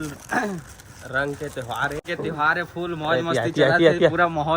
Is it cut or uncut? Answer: cut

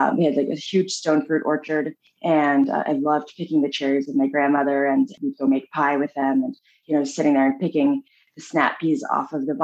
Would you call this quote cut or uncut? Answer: cut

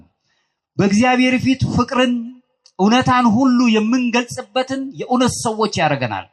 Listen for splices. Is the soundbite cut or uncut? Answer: uncut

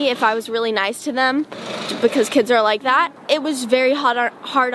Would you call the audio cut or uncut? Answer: cut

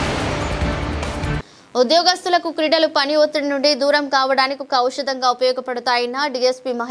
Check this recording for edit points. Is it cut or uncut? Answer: cut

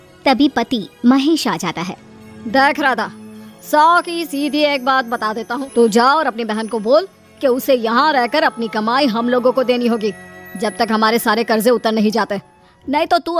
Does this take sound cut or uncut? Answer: cut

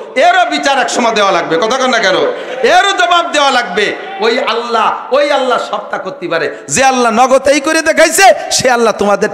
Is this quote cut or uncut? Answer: uncut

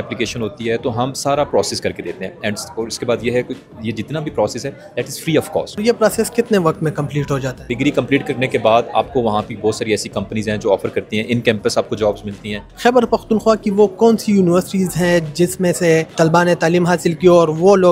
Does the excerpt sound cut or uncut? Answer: cut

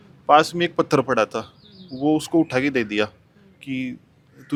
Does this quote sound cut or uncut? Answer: uncut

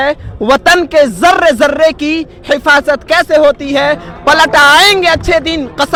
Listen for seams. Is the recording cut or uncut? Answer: uncut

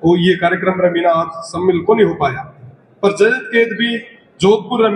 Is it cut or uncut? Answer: uncut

